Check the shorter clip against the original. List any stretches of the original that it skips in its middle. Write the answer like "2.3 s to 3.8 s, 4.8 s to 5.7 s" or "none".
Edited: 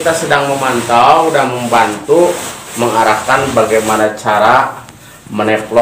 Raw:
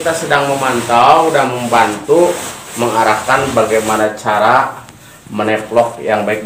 none